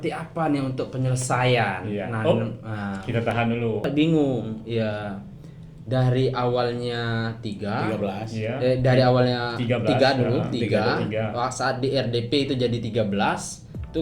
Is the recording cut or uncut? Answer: cut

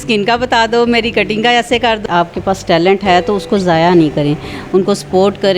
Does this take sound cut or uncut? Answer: cut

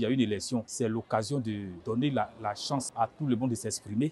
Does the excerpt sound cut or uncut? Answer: uncut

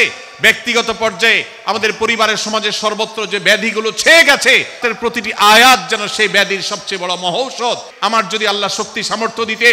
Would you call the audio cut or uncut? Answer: cut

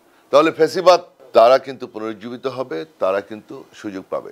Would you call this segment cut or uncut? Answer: cut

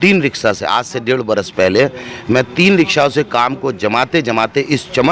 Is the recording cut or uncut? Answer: uncut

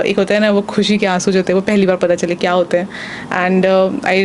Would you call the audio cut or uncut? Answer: uncut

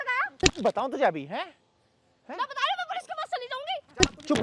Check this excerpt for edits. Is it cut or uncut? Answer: uncut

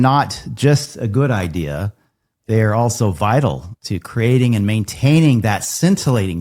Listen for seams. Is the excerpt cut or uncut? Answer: cut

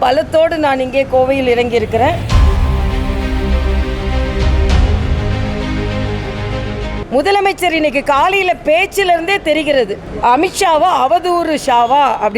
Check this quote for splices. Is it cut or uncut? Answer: cut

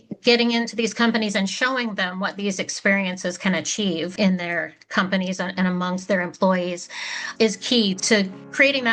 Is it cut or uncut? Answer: cut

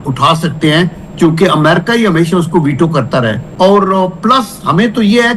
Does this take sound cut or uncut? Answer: cut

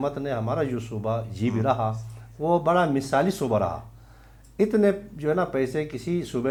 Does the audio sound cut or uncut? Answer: uncut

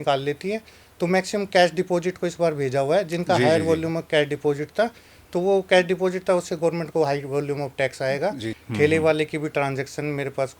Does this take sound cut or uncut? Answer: cut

